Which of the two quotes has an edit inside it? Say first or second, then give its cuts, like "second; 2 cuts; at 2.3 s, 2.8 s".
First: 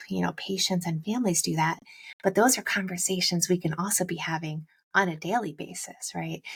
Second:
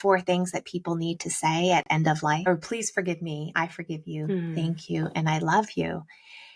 second; 1 cut; at 2.5 s